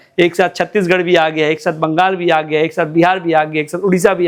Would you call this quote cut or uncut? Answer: uncut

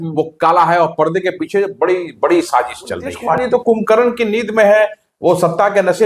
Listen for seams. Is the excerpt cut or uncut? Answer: cut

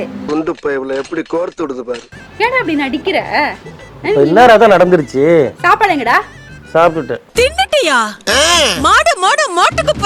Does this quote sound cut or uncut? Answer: cut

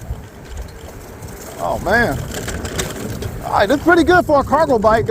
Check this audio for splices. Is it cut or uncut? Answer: uncut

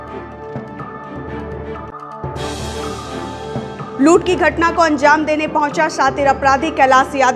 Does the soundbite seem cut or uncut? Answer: uncut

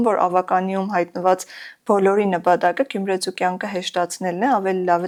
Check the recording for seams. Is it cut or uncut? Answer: uncut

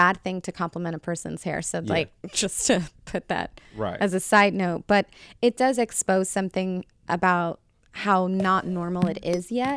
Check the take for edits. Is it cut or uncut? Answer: uncut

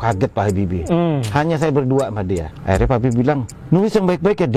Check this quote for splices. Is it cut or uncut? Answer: cut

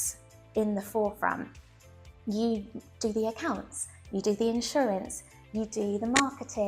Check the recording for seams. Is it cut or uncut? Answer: uncut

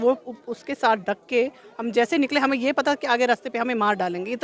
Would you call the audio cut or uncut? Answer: uncut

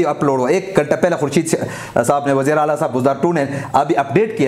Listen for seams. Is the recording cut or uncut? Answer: uncut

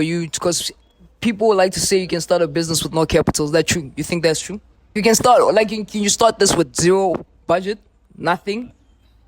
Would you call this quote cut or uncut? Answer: uncut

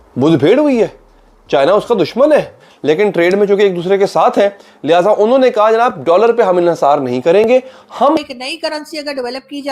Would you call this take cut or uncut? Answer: cut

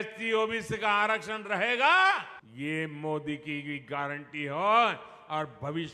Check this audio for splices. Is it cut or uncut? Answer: cut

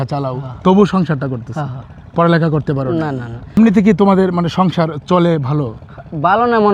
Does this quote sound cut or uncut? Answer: cut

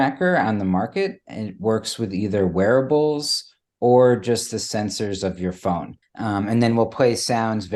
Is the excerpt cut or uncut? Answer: cut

